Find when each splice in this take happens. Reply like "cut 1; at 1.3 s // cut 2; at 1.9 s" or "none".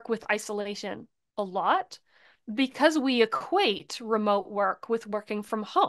none